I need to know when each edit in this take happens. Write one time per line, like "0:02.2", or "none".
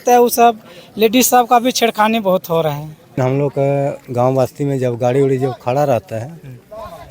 0:03.2